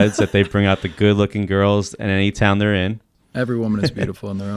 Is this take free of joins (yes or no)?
no